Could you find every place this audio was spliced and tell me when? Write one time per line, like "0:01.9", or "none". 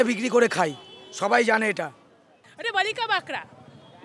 0:02.4